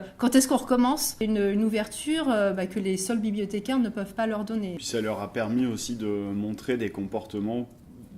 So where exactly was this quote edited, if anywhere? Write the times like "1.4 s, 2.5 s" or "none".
1.2 s, 4.8 s